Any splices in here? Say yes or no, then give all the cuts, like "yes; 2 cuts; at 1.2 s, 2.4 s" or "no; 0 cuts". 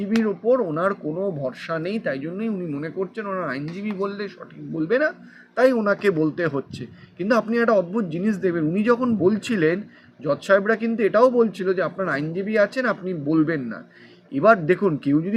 no; 0 cuts